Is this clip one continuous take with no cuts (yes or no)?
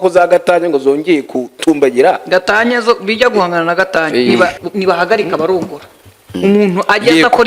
no